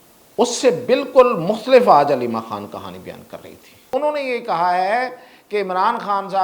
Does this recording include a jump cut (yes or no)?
yes